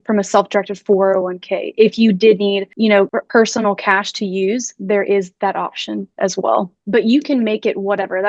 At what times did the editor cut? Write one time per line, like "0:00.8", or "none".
0:06.8